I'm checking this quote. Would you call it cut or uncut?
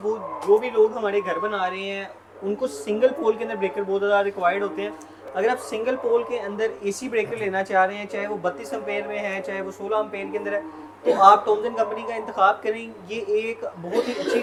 uncut